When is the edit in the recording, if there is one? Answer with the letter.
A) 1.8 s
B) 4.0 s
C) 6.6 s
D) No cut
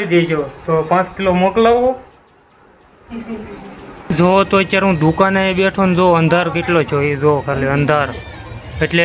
B